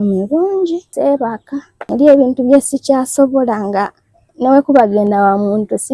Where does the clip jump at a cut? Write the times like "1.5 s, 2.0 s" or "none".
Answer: 0.9 s, 1.7 s